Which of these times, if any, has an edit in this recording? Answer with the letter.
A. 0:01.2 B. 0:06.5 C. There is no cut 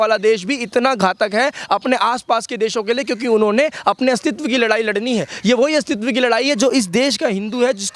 C